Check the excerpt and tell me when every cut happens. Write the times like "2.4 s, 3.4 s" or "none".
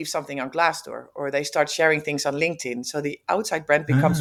none